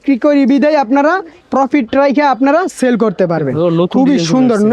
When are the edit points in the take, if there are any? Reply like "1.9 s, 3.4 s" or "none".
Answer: 1.3 s